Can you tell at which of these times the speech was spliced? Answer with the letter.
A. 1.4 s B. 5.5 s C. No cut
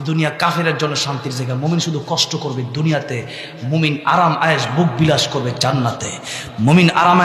C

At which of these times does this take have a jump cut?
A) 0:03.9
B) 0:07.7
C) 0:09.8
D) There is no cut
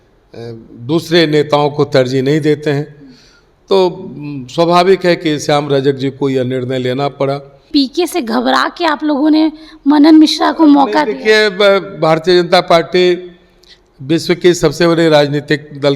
B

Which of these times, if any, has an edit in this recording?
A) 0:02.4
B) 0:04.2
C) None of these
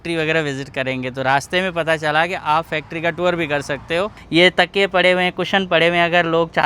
B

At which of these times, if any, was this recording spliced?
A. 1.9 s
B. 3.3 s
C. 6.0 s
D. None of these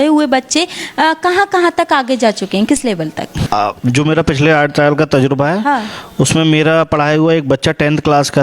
B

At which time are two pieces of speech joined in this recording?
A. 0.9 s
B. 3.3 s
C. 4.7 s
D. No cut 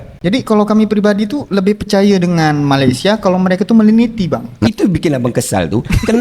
C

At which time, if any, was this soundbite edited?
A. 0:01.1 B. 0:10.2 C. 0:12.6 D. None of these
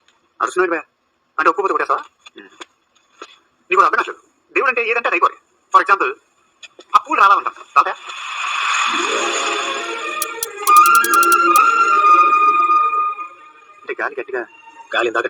B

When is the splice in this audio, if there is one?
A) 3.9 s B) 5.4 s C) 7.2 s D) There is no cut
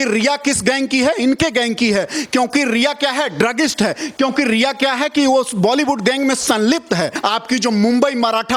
C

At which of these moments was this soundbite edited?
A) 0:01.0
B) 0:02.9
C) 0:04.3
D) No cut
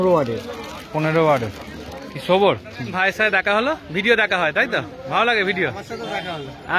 B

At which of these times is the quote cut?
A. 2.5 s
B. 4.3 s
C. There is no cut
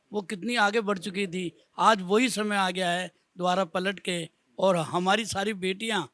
C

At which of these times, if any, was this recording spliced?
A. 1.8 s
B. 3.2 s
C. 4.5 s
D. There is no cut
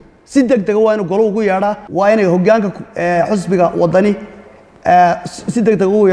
A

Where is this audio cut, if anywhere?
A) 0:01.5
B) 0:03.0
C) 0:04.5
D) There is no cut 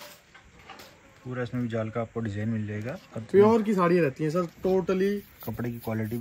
D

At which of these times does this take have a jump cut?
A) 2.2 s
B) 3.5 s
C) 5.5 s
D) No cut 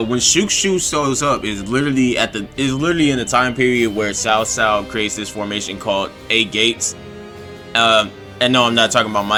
D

